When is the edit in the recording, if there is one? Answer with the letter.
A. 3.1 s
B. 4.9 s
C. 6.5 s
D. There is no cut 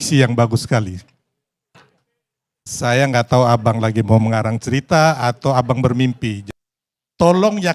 C